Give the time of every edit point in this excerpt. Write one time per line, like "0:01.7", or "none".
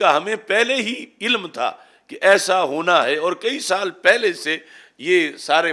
none